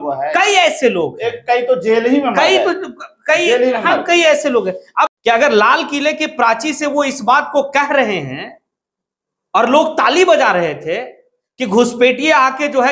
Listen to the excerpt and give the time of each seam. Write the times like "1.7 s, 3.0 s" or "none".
5.1 s

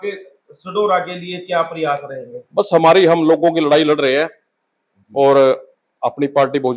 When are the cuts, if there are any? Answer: none

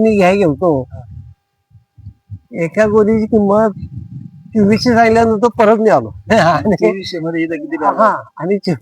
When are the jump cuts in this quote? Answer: none

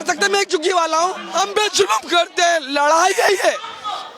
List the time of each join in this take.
1.2 s

